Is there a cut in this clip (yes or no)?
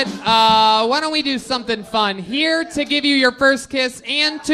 no